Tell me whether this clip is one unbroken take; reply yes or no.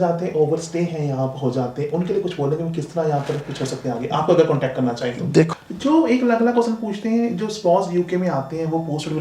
no